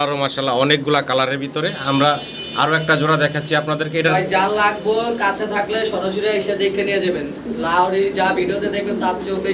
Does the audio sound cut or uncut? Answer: uncut